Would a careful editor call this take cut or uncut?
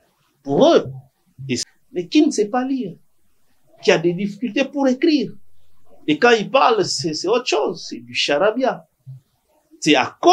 cut